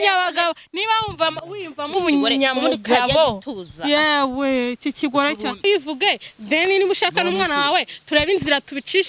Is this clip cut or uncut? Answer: cut